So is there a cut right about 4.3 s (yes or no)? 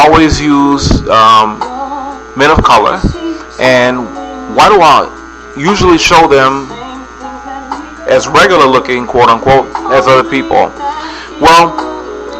no